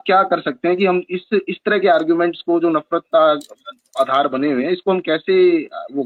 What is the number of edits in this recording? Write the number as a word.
zero